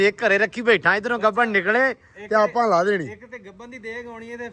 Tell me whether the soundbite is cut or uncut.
uncut